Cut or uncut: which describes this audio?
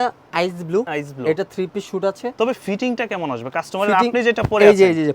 cut